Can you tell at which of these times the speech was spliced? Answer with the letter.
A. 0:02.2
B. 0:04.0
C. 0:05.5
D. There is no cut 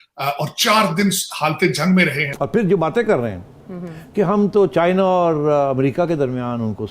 A